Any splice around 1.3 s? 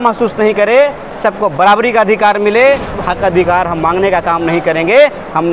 no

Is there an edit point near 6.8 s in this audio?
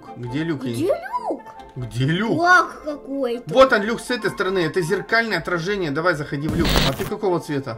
yes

